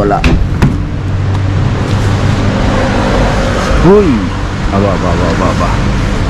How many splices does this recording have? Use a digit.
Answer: 0